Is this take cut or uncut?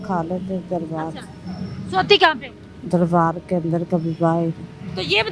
uncut